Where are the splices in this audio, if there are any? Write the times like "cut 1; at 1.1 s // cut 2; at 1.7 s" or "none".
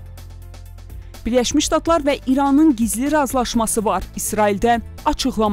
cut 1; at 1.2 s